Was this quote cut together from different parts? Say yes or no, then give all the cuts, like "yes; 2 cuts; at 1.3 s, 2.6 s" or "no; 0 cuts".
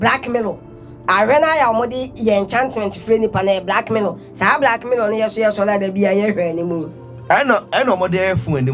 no; 0 cuts